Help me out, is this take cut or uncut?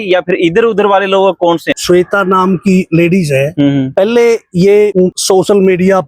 cut